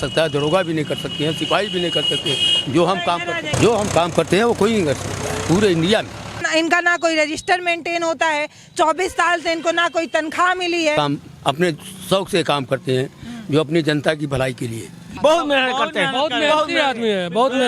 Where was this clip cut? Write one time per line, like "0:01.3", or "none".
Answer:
0:03.5
0:06.5
0:10.9
0:15.0